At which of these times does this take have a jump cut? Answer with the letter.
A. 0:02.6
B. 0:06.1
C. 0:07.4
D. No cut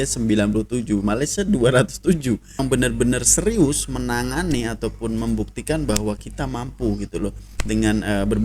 A